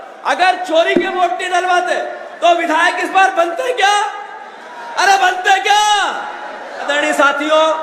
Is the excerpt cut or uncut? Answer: cut